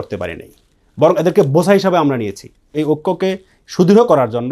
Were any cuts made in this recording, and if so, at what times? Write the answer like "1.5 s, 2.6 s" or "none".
2.7 s